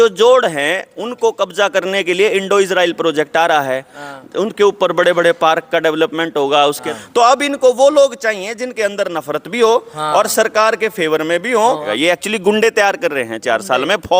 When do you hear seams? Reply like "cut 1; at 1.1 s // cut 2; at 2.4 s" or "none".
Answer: cut 1; at 6.9 s // cut 2; at 11.9 s